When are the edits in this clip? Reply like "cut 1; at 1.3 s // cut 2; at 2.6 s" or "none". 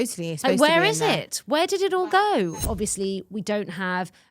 cut 1; at 2.6 s

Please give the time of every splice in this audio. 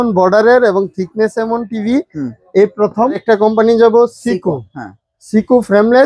cut 1; at 3.2 s

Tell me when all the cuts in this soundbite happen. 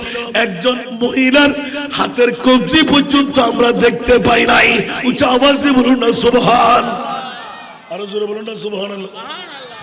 none

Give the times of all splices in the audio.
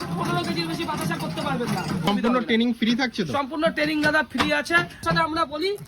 cut 1; at 2.1 s // cut 2; at 5.0 s

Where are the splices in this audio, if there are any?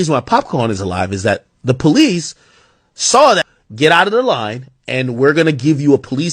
cut 1; at 3.5 s

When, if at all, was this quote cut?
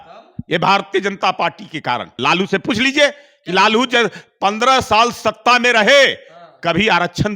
cut 1; at 2.1 s

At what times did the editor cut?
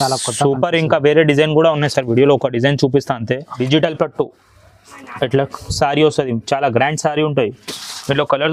cut 1; at 3.5 s

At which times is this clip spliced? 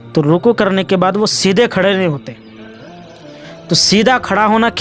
none

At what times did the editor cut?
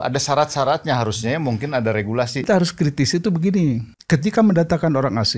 cut 1; at 2.4 s // cut 2; at 3.9 s

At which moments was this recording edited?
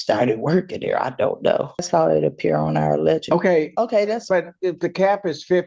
cut 1; at 1.9 s

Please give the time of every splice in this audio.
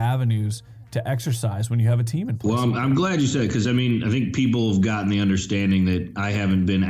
cut 1; at 2.4 s

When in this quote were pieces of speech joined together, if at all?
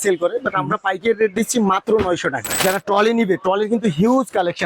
cut 1; at 2.6 s

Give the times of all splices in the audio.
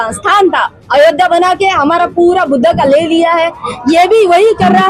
none

